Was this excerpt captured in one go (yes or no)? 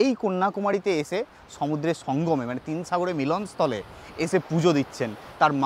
yes